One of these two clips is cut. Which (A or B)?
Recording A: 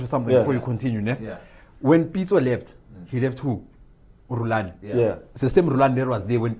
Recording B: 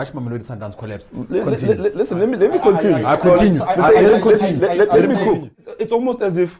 B